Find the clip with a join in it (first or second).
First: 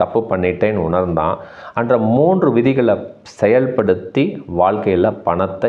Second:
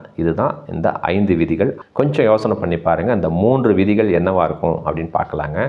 second